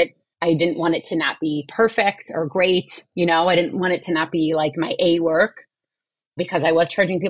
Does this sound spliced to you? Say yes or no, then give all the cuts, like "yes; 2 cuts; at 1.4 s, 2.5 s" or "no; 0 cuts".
no; 0 cuts